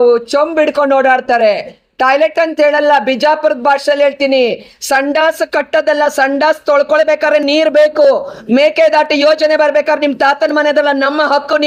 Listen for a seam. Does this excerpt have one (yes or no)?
no